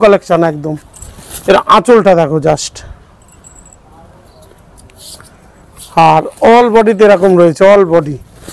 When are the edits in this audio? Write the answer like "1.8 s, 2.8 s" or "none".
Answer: none